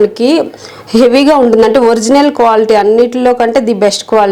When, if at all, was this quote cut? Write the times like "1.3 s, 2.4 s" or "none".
none